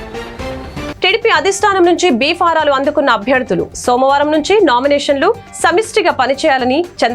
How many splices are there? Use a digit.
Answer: 1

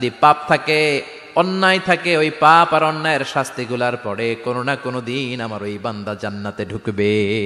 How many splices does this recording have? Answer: 0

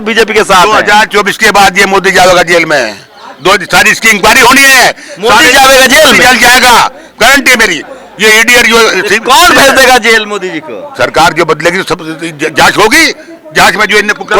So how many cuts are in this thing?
0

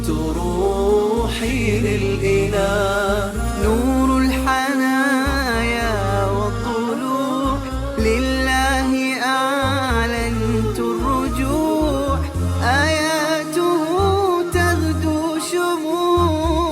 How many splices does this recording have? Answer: 1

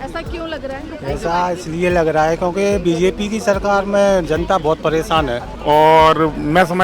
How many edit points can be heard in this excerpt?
1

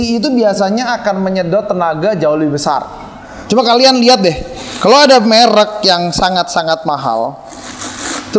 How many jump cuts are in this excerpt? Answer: 1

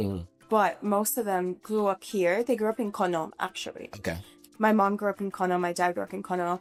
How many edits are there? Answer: 0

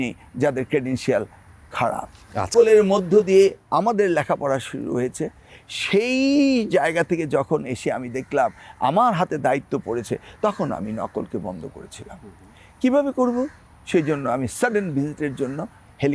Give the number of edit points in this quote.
1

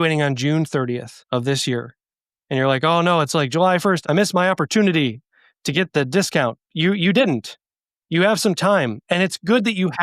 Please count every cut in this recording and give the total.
3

